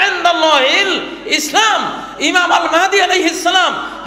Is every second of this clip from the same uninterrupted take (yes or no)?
yes